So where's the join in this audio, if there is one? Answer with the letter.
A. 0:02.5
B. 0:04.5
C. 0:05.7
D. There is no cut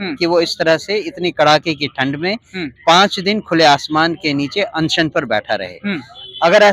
D